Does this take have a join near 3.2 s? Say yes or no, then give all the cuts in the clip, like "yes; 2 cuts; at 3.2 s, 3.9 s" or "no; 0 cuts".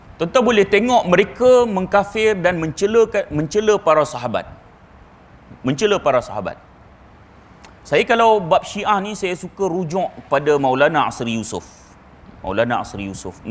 yes; 1 cut; at 3.2 s